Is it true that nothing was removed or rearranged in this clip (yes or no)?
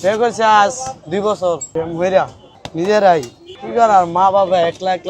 no